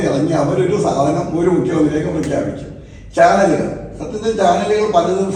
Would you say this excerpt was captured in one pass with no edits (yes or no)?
yes